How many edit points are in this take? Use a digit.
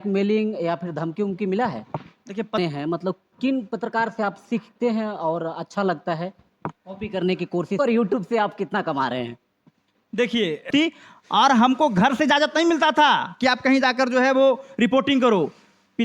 3